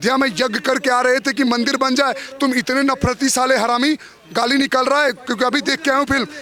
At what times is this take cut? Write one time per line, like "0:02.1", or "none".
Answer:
none